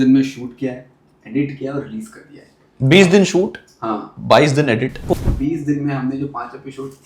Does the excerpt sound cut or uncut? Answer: cut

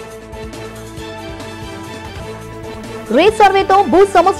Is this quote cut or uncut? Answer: uncut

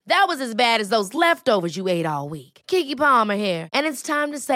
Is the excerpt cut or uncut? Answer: uncut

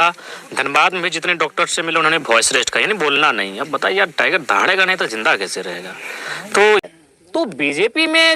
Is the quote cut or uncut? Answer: cut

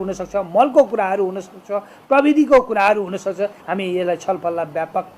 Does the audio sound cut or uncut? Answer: cut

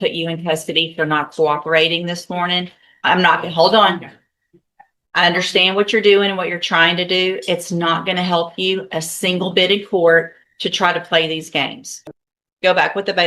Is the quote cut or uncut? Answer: cut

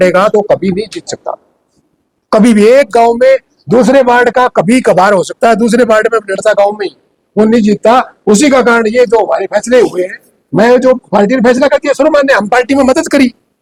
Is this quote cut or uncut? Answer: uncut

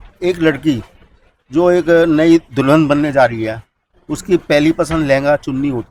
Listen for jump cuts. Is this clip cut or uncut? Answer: uncut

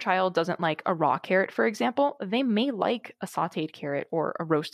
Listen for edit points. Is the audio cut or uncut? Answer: uncut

